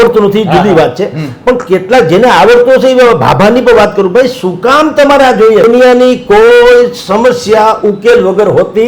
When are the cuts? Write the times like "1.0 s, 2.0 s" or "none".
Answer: 5.7 s